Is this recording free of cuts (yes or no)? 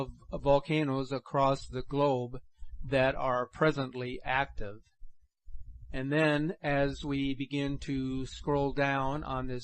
no